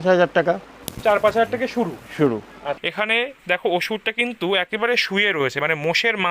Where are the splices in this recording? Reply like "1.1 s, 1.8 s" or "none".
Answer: 2.7 s